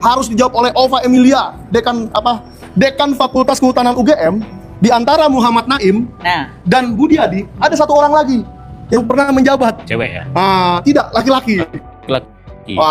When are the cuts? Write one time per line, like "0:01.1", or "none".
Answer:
none